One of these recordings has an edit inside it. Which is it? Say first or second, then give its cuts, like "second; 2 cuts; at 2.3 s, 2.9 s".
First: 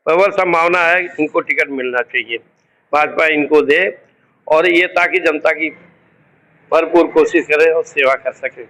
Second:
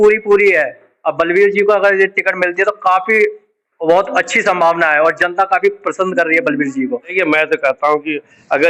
second; 1 cut; at 7.1 s